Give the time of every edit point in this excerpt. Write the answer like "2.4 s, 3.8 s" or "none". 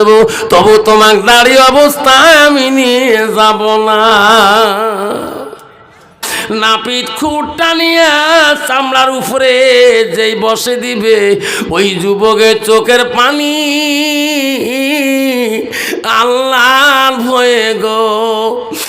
6.3 s